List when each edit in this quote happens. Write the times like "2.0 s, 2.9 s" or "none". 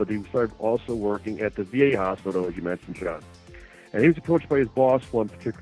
2.4 s